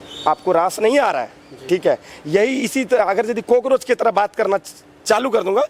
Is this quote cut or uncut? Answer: uncut